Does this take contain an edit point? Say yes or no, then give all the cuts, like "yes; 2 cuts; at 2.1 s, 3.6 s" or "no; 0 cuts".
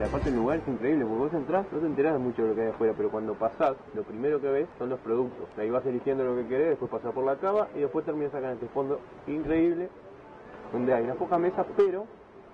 yes; 4 cuts; at 1.7 s, 3.9 s, 4.7 s, 5.4 s